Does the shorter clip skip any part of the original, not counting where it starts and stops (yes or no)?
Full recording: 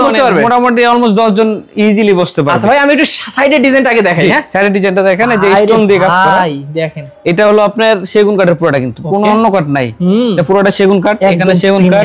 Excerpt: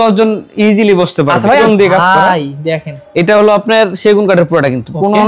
yes